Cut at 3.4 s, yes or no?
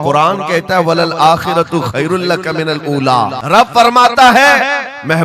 yes